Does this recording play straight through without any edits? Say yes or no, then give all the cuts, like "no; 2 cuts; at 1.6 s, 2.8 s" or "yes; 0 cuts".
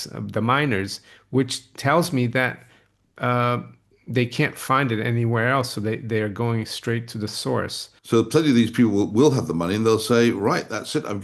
no; 1 cut; at 7.8 s